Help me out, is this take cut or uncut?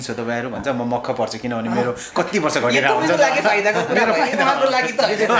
uncut